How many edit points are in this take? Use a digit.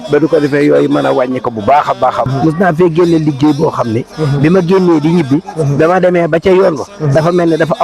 1